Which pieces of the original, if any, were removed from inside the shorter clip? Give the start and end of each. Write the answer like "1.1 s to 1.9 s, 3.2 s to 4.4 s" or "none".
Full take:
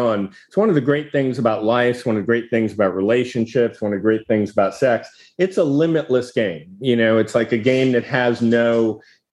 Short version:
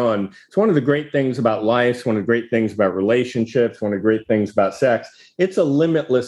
none